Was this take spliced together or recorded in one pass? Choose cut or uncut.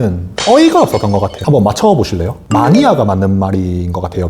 cut